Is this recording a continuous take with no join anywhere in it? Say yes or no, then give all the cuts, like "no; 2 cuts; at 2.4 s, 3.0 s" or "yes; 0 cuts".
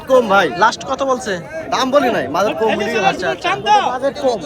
yes; 0 cuts